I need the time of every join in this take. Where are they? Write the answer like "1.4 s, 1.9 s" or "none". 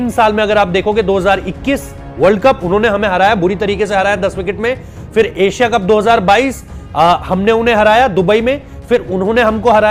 none